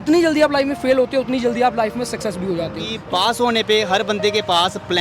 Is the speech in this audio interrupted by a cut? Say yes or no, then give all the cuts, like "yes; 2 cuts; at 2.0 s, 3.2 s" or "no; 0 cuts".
yes; 1 cut; at 2.9 s